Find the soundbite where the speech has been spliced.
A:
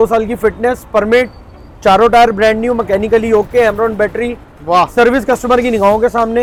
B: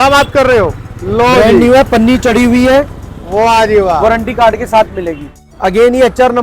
B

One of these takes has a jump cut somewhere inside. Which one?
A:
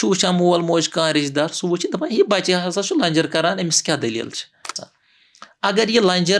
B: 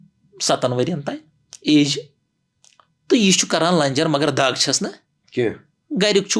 A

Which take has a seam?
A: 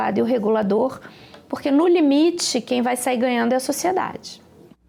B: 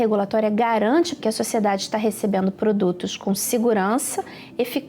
B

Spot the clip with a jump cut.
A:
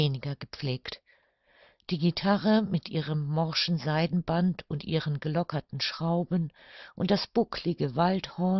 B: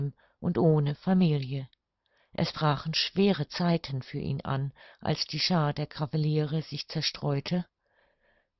B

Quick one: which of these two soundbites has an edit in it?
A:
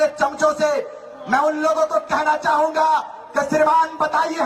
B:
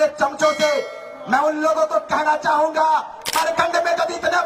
B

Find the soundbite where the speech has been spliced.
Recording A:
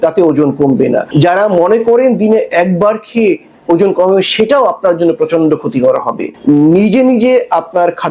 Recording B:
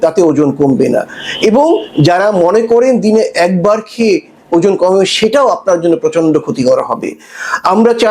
A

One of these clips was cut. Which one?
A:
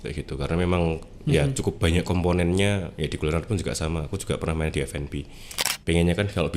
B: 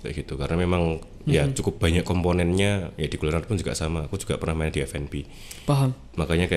A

